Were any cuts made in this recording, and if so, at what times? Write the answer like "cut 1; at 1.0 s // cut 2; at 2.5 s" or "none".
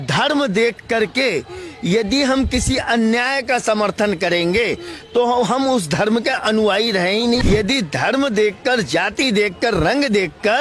cut 1; at 7.4 s